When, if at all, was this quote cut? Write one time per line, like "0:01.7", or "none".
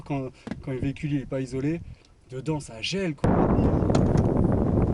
0:03.3